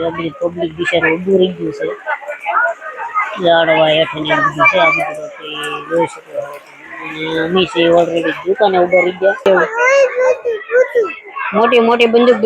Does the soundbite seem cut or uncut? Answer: cut